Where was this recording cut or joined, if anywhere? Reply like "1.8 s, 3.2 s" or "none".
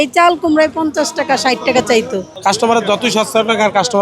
2.3 s